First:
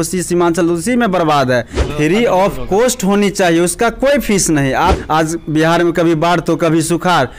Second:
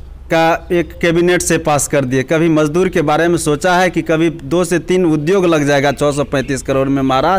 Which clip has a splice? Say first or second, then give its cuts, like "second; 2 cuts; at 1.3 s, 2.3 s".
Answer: first; 2 cuts; at 1.8 s, 5.0 s